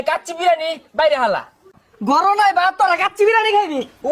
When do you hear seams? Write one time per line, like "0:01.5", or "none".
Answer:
0:01.7